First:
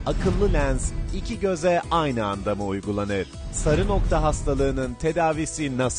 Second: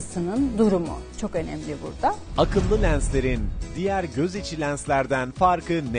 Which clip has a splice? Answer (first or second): second